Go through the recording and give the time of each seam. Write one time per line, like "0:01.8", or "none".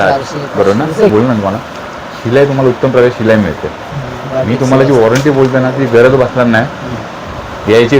0:01.1